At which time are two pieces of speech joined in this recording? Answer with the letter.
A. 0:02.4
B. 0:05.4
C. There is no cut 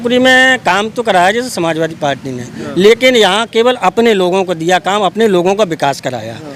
C